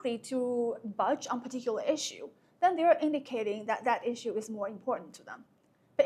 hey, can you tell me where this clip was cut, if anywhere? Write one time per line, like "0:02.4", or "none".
none